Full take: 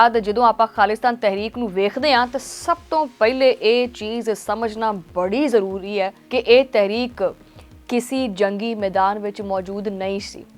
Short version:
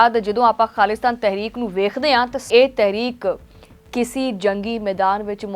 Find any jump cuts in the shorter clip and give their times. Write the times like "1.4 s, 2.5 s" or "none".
2.5 s